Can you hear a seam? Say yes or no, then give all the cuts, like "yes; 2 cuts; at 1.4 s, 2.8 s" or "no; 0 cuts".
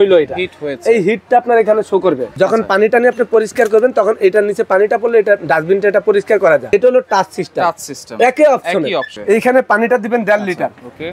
yes; 3 cuts; at 2.3 s, 6.7 s, 9.1 s